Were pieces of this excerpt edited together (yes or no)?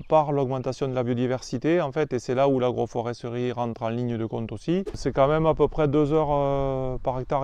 yes